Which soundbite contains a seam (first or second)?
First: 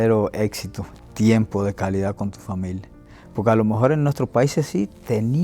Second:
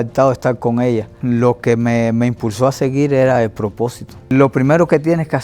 second